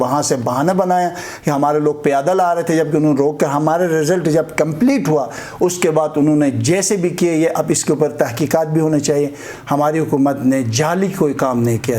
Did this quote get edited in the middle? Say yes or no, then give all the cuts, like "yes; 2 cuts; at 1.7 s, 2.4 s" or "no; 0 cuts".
yes; 1 cut; at 9.5 s